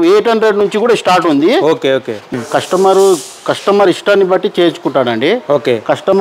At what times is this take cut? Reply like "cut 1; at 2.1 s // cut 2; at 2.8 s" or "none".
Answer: cut 1; at 2.2 s